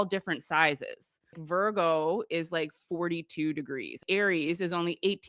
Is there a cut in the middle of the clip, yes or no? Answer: yes